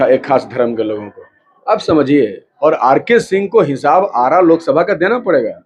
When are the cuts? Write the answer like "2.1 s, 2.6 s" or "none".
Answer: 2.4 s